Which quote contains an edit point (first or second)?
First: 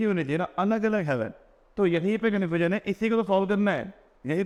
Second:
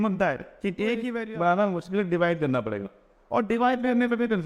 second